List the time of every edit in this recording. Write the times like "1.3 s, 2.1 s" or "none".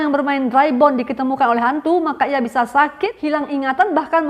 3.2 s